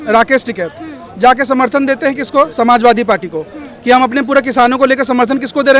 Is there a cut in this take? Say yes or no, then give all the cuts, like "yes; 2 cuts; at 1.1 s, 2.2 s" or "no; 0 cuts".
no; 0 cuts